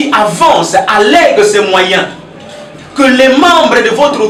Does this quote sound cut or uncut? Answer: uncut